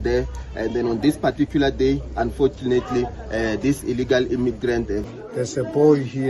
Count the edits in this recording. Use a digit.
1